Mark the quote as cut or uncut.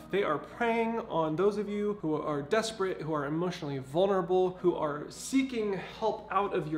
cut